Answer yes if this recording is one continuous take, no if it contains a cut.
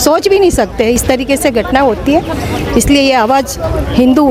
yes